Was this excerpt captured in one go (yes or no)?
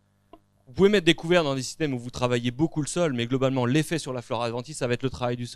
yes